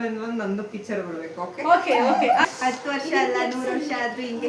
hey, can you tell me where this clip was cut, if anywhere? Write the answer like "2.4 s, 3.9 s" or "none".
2.5 s